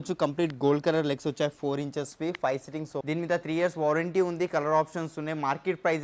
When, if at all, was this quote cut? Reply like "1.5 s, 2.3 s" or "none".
3.0 s